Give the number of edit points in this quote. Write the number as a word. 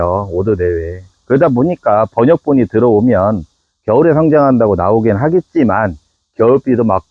zero